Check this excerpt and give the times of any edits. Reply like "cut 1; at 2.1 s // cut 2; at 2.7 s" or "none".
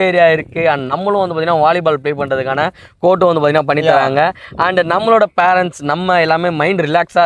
none